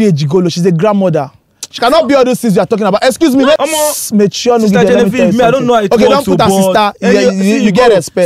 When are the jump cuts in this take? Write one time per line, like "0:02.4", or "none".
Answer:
0:03.6